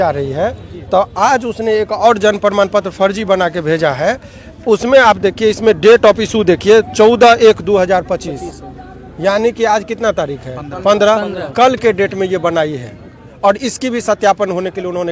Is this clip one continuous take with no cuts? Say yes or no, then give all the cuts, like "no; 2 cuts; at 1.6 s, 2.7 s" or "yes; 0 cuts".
yes; 0 cuts